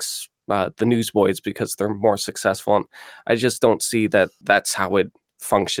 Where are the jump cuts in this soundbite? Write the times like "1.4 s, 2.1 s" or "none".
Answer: 4.4 s